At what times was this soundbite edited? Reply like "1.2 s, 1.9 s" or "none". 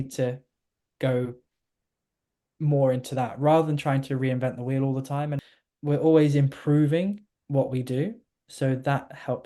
5.4 s